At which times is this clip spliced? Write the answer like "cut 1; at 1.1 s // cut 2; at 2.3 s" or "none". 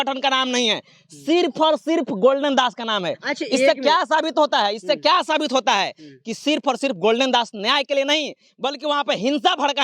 none

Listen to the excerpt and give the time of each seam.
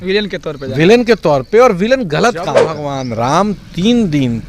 cut 1; at 2.8 s

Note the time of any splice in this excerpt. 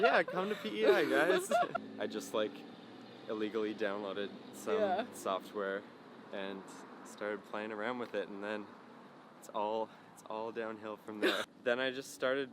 cut 1; at 1.7 s // cut 2; at 11.4 s

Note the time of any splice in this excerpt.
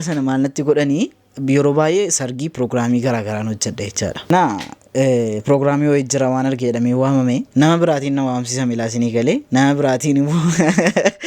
cut 1; at 4.3 s

